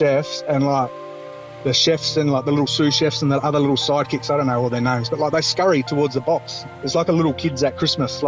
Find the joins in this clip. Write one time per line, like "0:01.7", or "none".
none